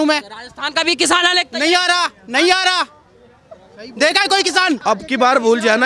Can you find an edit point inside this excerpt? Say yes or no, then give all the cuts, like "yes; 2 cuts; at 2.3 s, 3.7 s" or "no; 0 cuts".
yes; 1 cut; at 4.8 s